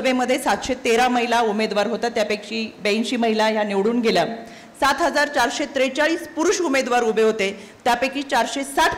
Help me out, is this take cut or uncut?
uncut